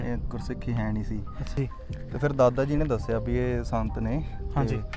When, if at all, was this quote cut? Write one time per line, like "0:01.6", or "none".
0:01.4